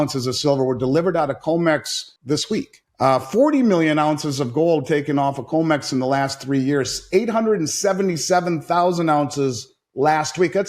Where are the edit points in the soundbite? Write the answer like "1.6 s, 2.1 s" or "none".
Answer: 2.3 s